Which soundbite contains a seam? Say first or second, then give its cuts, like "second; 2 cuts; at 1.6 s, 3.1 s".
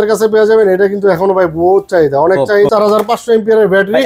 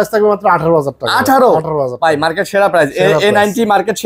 first; 1 cut; at 2.7 s